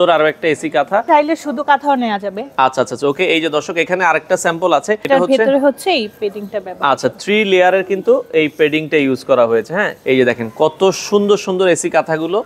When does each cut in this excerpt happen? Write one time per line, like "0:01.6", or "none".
0:01.1
0:05.0
0:09.9